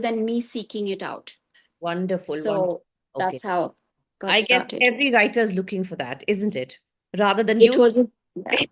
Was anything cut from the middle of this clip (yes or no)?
no